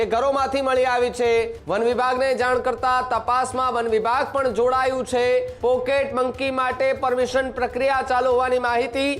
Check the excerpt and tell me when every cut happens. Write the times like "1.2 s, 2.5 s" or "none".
1.6 s, 5.5 s